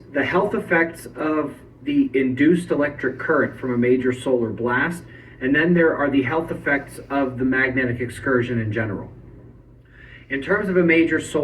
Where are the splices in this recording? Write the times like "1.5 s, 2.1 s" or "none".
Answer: 5.8 s